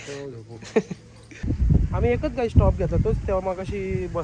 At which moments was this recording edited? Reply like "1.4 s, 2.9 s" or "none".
1.4 s